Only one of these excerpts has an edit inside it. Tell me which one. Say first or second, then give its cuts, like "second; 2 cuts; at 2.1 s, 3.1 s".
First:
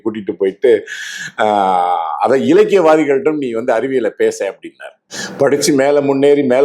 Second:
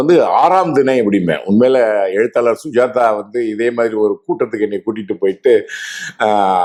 first; 1 cut; at 5.2 s